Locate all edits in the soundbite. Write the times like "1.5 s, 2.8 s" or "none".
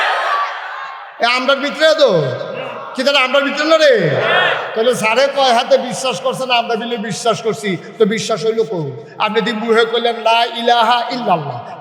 none